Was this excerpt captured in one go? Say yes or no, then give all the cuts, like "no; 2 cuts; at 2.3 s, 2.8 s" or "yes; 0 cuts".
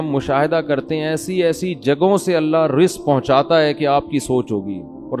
yes; 0 cuts